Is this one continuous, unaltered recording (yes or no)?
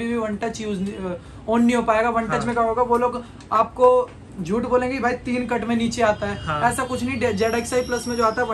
yes